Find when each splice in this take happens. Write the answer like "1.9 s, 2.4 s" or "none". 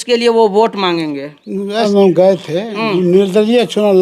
1.9 s